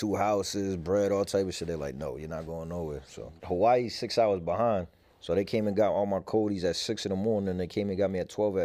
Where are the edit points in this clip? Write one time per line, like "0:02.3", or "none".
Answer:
0:03.3